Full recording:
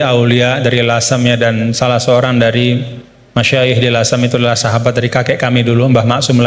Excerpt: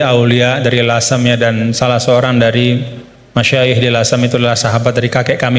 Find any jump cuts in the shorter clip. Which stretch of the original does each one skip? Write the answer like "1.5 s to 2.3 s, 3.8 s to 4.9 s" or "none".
none